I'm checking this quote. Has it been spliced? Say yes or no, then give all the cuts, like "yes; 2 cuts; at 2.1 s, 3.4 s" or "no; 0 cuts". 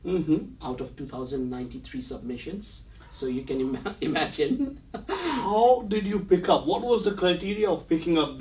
no; 0 cuts